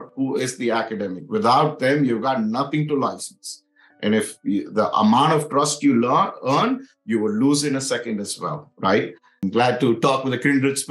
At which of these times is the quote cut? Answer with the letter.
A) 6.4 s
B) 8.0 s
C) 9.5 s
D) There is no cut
C